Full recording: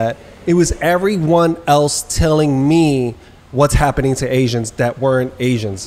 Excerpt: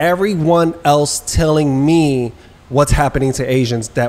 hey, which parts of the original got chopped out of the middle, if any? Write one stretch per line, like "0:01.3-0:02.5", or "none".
none